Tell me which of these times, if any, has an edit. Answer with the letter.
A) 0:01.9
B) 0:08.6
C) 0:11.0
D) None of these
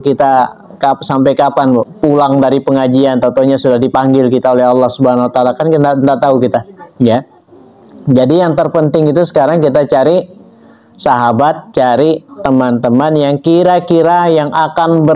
A